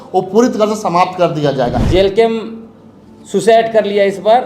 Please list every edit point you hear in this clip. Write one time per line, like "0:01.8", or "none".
0:01.8